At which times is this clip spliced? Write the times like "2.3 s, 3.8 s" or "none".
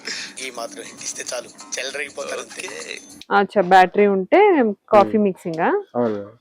3.2 s